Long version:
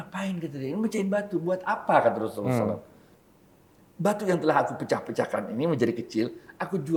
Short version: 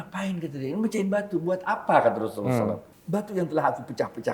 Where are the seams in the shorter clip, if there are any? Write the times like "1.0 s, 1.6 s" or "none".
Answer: 2.9 s

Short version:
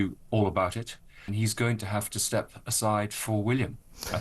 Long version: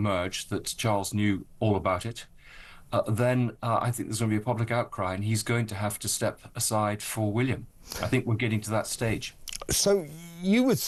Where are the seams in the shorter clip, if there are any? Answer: 1.3 s

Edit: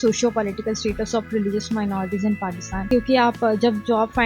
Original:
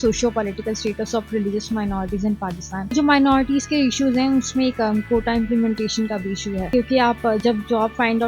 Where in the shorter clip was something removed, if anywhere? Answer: 2.8 s

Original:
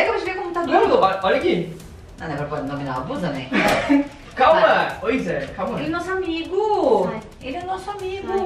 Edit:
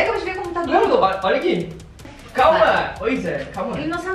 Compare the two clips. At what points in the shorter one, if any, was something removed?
2.2 s

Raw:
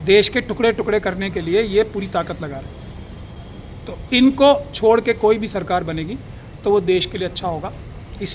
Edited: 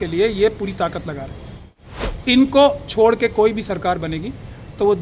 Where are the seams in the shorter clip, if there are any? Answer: 2.2 s

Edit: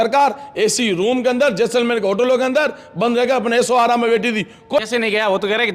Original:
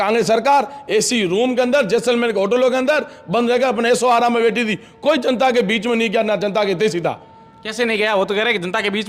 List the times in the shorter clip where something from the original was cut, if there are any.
4.8 s

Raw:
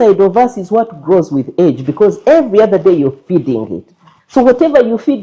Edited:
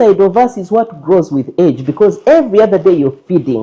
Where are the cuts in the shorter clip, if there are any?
none

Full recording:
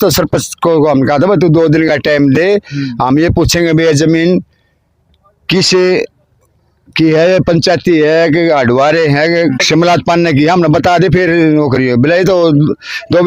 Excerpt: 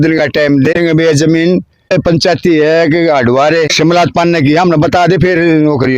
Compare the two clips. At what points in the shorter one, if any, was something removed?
0.7 s, 1.9 s, 3.7 s

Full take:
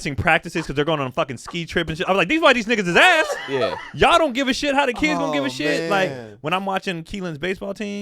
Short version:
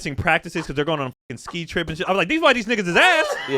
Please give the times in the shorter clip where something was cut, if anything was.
none

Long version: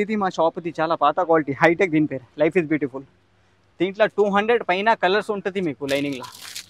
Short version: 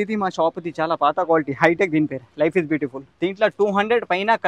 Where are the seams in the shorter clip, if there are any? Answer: 3.0 s

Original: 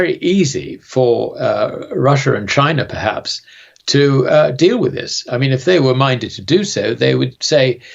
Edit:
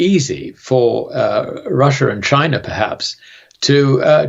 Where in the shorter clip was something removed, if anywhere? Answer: none

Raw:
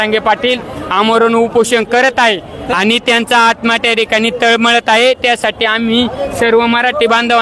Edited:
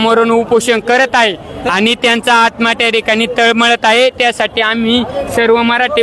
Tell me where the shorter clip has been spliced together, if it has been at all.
none

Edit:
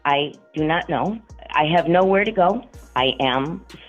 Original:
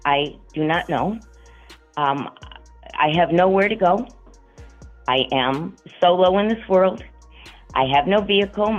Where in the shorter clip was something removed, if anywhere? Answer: 1.3 s, 2.8 s

